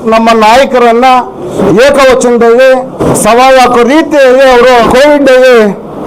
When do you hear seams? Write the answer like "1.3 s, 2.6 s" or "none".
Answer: 1.5 s, 3.0 s, 4.8 s